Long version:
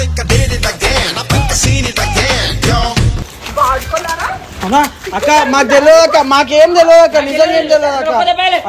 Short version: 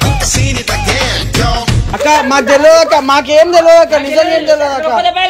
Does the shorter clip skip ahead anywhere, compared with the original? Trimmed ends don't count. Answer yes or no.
yes